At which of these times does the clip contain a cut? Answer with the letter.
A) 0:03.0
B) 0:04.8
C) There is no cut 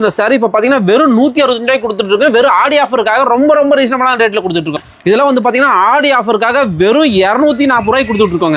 B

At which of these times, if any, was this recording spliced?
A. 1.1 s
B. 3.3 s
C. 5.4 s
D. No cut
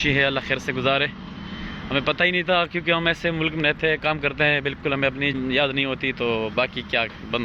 C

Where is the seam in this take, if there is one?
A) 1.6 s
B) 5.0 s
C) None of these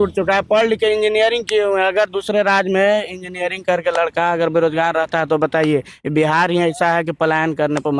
C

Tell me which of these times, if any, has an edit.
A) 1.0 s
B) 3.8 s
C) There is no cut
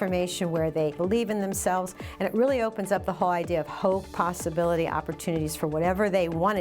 A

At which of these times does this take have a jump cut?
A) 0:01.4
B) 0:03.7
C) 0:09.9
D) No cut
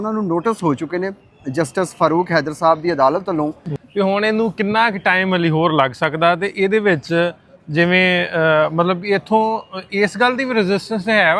B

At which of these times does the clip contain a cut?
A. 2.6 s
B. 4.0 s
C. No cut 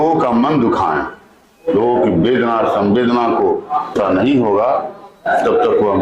B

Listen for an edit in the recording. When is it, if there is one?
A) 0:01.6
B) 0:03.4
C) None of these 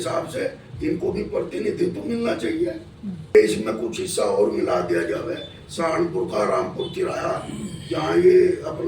B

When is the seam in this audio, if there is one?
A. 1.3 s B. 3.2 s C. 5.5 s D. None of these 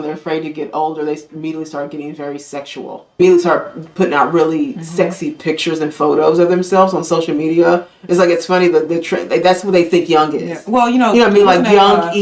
B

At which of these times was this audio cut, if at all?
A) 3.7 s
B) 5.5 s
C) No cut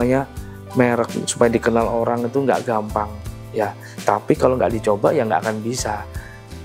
C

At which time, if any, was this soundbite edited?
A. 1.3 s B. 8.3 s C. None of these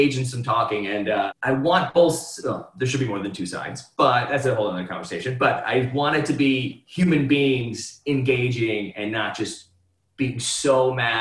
A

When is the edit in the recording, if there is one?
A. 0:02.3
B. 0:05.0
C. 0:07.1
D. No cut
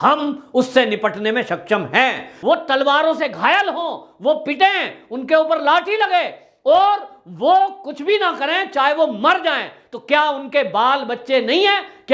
A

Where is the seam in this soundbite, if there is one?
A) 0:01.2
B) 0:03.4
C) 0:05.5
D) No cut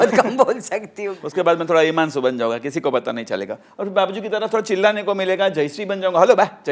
A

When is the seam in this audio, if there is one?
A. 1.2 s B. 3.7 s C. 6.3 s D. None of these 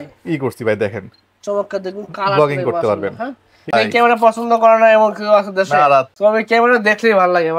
B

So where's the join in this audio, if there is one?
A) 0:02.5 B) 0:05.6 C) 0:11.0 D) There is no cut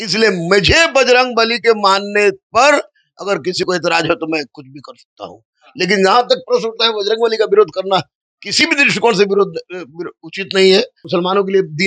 C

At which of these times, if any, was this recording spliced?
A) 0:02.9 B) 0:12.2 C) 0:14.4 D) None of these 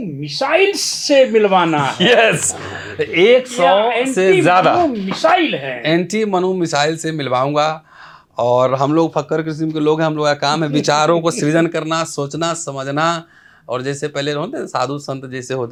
D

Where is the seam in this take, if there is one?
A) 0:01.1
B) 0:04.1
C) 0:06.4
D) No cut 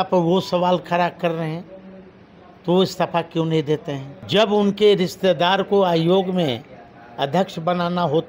B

